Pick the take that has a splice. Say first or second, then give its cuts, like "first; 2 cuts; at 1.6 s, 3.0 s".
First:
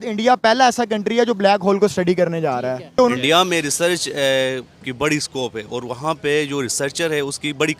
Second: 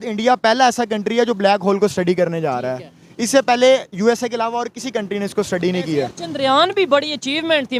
first; 1 cut; at 2.9 s